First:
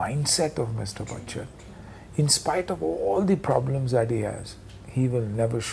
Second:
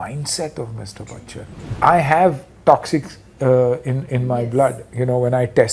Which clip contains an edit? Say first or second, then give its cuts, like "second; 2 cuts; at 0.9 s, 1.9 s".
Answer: second; 1 cut; at 1.6 s